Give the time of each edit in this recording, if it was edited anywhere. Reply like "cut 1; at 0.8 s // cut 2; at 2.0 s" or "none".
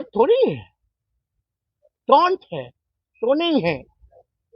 none